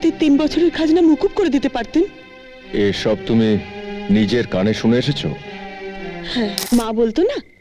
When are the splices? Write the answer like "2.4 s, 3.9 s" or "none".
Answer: 6.6 s